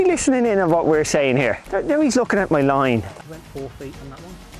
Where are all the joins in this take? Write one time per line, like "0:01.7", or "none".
0:01.7
0:03.3

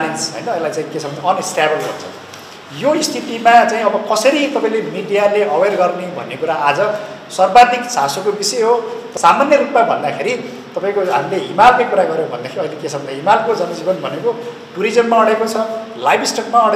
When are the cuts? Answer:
0:09.1

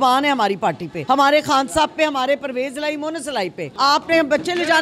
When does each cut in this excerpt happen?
0:00.9
0:03.6

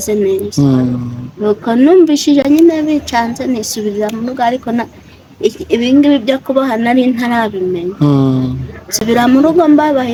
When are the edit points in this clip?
none

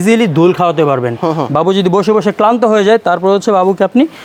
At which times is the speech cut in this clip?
none

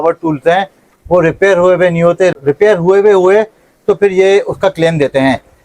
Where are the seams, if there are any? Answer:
none

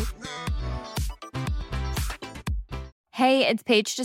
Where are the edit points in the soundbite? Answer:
0:02.9

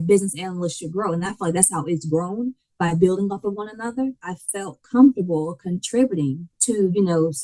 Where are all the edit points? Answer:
0:04.3
0:06.5

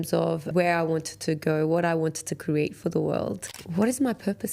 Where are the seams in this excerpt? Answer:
0:03.4

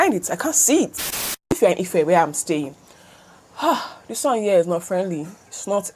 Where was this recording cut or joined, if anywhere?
0:01.2

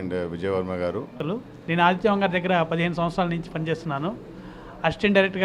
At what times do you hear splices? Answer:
0:01.2

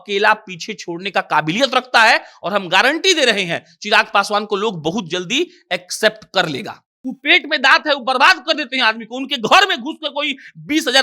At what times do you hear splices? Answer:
0:06.9

